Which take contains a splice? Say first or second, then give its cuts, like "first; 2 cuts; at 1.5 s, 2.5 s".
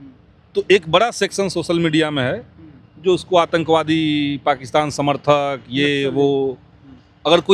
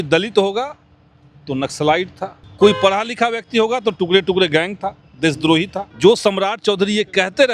second; 2 cuts; at 2.4 s, 5.8 s